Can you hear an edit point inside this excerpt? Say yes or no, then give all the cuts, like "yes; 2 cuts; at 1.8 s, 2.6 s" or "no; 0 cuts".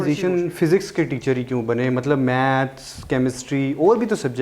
no; 0 cuts